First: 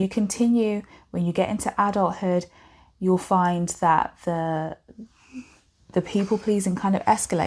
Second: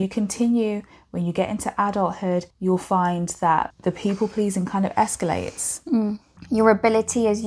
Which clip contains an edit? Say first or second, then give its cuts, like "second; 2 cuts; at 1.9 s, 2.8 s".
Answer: second; 3 cuts; at 2.5 s, 3.7 s, 6.3 s